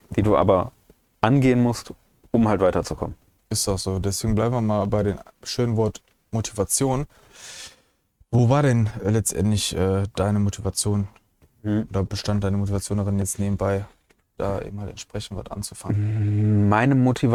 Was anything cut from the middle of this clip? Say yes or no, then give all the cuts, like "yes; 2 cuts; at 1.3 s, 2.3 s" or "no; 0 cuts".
no; 0 cuts